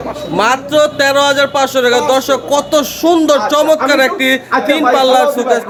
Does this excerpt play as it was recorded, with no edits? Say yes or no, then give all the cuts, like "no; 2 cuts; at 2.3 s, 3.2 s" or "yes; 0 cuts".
yes; 0 cuts